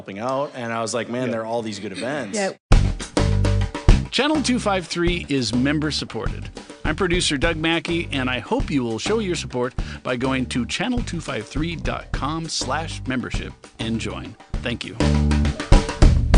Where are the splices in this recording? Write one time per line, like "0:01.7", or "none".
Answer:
0:02.6